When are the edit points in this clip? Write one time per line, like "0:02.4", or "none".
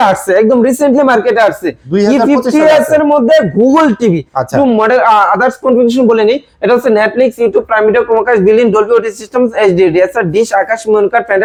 none